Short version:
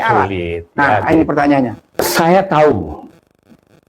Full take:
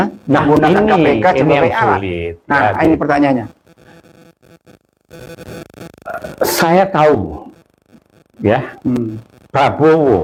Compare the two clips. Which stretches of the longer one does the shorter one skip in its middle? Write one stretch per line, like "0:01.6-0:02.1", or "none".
0:03.6-0:06.3